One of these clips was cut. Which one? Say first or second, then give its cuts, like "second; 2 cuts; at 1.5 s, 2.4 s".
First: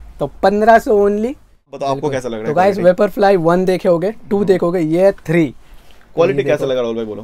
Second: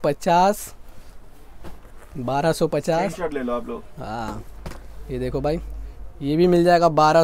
first; 1 cut; at 1.8 s